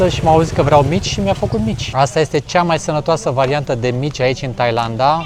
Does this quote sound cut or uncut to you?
cut